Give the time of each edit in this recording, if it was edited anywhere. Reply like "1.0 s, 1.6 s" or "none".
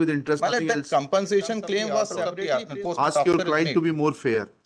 2.2 s